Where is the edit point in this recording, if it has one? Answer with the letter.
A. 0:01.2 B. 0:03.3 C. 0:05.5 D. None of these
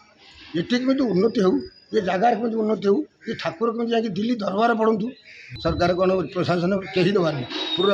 C